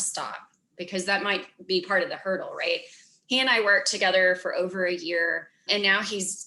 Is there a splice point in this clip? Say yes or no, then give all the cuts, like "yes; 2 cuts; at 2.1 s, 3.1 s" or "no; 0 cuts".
no; 0 cuts